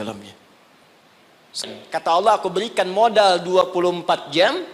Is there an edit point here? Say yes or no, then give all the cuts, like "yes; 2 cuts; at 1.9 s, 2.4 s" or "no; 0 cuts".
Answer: yes; 1 cut; at 1.7 s